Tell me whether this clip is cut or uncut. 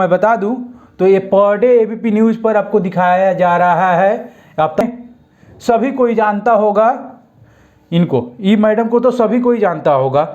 cut